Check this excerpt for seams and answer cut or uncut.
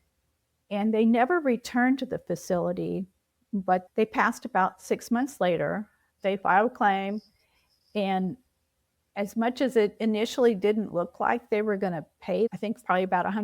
cut